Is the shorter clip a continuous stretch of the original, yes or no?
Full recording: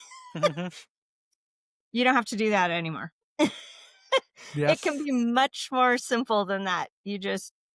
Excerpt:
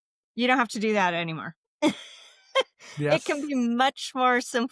yes